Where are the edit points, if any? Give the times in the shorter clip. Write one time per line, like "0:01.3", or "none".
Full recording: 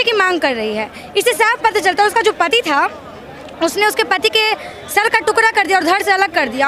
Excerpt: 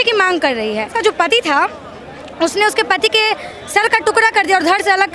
0:00.9